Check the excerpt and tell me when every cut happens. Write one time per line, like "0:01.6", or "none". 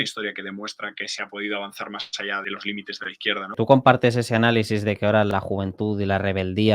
0:02.4
0:03.5
0:05.3